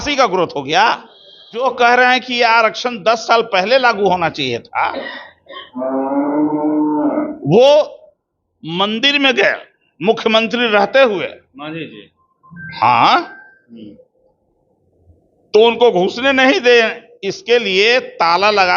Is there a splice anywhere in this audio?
yes; 1 cut; at 1.6 s

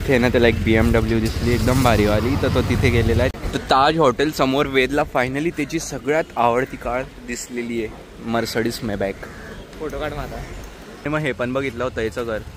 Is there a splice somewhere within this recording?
yes; 3 cuts; at 3.3 s, 9.7 s, 11.0 s

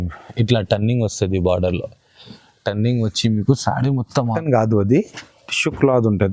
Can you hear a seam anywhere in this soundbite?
yes; 1 cut; at 4.4 s

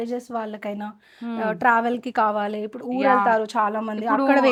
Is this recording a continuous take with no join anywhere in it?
yes; 0 cuts

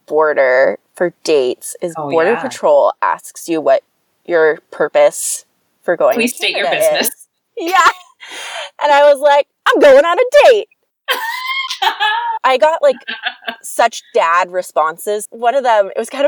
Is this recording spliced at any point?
yes; 1 cut; at 15.2 s

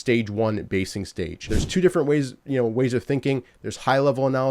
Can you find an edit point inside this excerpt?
yes; 1 cut; at 1.6 s

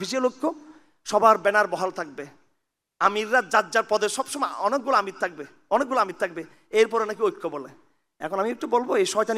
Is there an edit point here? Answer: no; 0 cuts

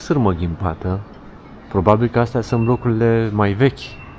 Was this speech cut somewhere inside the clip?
no; 0 cuts

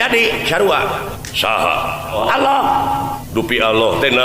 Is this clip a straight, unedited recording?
no; 3 cuts; at 1.2 s, 2.2 s, 3.2 s

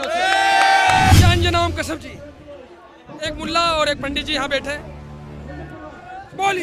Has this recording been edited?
yes; 1 cut; at 1.2 s

